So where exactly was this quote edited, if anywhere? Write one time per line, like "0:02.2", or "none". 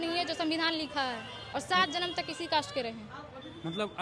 0:01.4